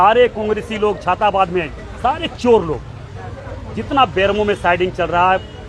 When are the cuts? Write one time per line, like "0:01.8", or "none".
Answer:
none